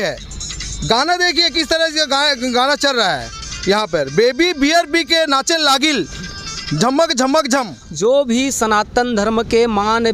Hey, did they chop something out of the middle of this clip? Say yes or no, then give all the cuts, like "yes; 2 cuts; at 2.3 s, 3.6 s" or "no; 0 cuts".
yes; 1 cut; at 7.8 s